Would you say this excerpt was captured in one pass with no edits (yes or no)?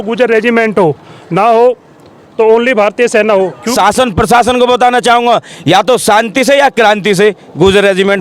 no